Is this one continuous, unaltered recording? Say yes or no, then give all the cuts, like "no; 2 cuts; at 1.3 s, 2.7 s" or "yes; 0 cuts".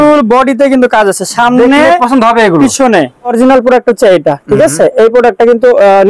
no; 1 cut; at 3.3 s